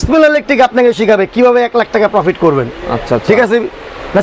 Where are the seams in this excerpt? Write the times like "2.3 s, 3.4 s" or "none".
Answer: none